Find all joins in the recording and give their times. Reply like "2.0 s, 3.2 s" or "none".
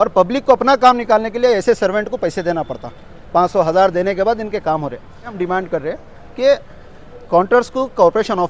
5.4 s